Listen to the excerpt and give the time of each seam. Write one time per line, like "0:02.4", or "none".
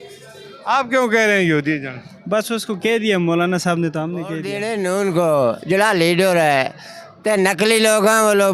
0:04.5